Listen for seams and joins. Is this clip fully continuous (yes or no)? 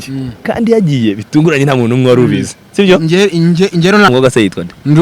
no